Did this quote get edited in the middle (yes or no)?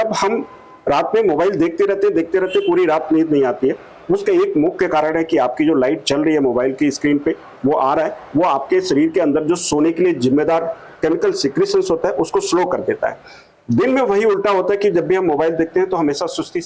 no